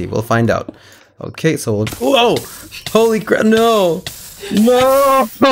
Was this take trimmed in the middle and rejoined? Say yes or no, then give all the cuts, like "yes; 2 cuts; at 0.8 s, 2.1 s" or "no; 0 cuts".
no; 0 cuts